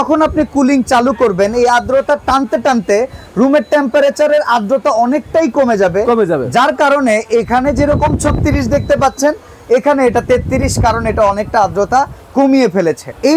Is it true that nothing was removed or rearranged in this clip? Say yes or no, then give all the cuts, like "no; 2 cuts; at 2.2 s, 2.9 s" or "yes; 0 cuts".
yes; 0 cuts